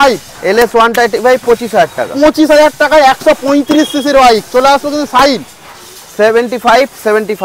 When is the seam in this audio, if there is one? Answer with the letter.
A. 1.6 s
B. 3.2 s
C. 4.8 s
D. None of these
D